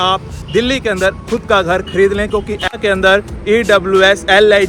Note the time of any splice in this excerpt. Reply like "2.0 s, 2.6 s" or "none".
2.8 s